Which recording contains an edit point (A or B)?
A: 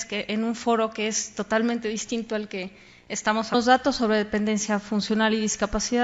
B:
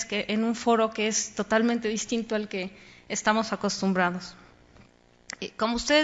B